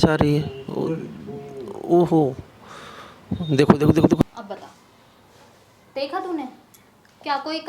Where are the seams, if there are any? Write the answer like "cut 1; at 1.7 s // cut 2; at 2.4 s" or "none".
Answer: cut 1; at 4.2 s